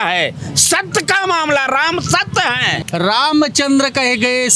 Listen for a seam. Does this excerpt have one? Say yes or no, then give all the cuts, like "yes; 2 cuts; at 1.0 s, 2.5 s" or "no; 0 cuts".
yes; 1 cut; at 2.7 s